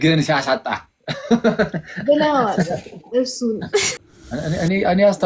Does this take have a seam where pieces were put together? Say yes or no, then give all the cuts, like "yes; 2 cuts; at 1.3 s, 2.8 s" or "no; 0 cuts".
yes; 1 cut; at 3.9 s